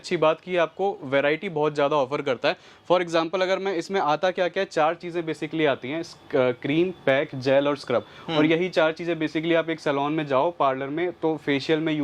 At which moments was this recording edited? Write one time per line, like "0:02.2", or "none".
none